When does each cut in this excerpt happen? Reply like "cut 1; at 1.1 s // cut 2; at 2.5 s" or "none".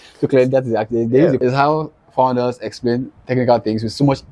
cut 1; at 1.4 s